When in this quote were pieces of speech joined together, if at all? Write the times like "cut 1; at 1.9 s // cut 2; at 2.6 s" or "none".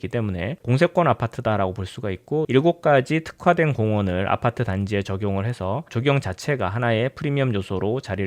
cut 1; at 2.5 s